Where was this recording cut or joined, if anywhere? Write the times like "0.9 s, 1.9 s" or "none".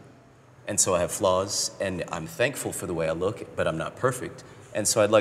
none